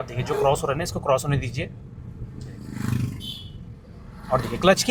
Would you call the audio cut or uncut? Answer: uncut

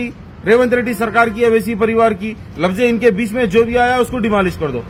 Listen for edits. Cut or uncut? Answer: uncut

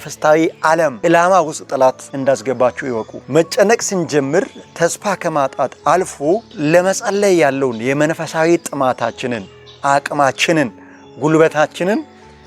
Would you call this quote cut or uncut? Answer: cut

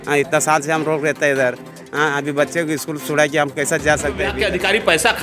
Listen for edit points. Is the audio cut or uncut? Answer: cut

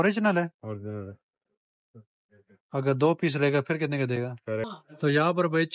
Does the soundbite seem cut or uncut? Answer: cut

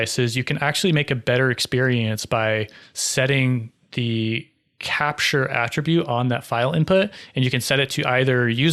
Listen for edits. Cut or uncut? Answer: uncut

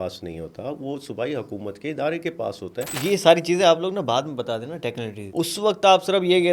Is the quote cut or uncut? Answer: cut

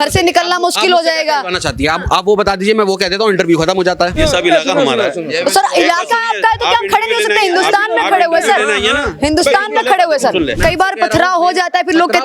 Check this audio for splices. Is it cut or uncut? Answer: cut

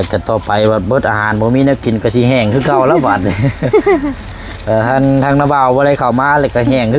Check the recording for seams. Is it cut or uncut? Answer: uncut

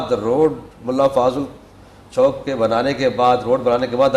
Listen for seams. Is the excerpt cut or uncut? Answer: uncut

